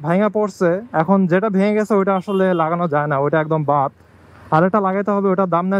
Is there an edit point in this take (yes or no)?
no